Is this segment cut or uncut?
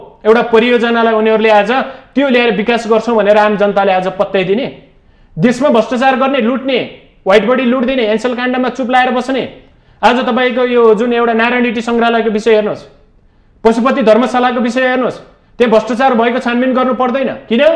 uncut